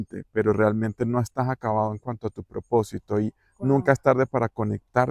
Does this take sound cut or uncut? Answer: uncut